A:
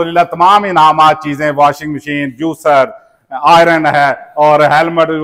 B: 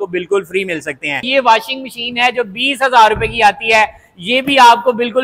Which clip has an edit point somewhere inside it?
B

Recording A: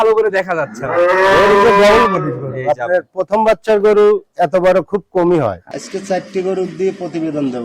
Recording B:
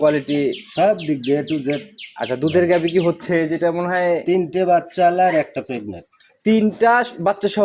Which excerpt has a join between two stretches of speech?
A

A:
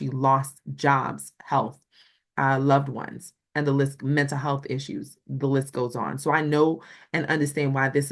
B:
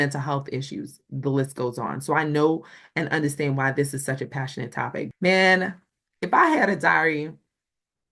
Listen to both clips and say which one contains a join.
B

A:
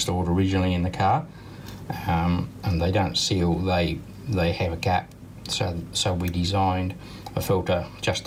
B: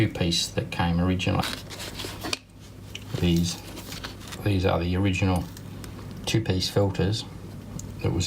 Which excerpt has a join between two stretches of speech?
B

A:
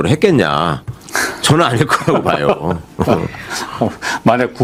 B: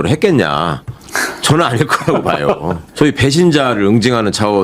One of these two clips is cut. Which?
B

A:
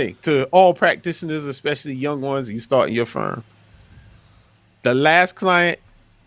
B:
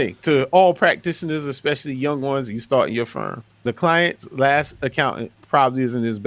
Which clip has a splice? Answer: B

